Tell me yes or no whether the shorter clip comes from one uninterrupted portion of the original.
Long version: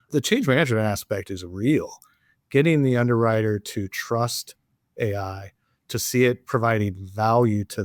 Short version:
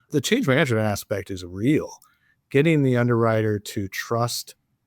yes